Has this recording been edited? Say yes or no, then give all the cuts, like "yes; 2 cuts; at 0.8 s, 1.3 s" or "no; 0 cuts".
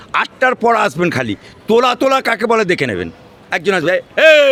no; 0 cuts